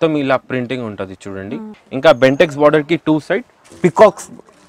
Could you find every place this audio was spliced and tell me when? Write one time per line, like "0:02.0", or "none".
0:01.7